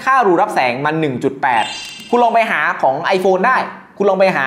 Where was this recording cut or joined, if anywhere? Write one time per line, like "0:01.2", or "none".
0:01.9